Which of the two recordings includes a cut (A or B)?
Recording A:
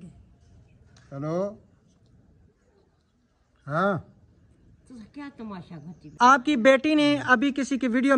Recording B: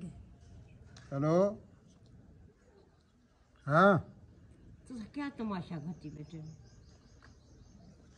A